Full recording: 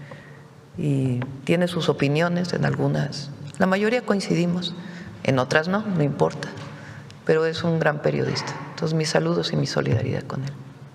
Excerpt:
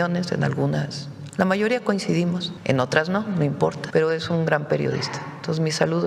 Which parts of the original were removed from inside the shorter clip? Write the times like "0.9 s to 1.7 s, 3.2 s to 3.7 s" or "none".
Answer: 4.7 s to 5.1 s, 6.4 s to 7.2 s